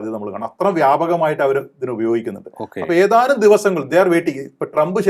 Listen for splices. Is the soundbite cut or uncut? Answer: uncut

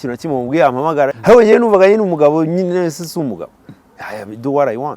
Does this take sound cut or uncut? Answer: cut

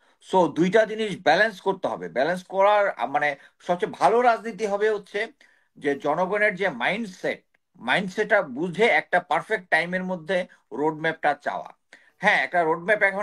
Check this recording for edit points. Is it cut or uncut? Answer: uncut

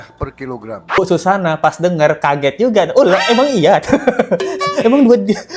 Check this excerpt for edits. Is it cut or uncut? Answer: cut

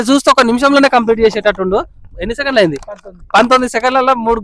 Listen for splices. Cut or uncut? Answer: uncut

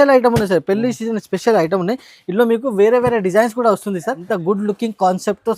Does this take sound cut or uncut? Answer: cut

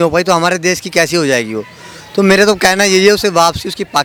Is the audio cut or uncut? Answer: uncut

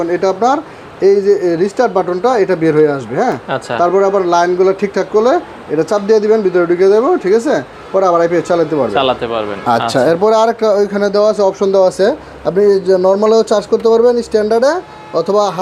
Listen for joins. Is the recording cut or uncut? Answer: uncut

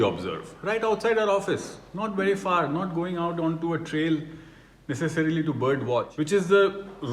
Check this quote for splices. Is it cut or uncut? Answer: cut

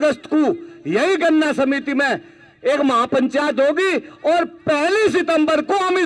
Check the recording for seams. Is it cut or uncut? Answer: uncut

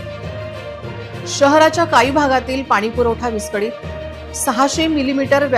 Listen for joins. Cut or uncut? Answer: cut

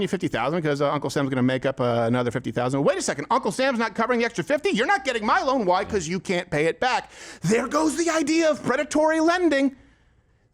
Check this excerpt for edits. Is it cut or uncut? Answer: uncut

